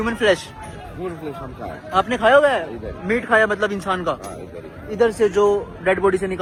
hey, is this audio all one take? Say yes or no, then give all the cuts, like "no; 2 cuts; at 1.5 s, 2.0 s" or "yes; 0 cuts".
yes; 0 cuts